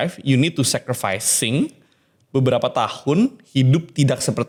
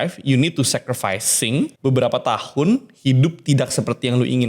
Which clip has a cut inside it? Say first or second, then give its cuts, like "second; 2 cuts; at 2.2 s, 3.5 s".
second; 1 cut; at 1.7 s